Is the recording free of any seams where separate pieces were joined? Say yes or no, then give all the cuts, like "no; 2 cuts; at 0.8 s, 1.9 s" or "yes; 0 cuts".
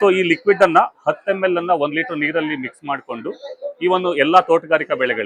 yes; 0 cuts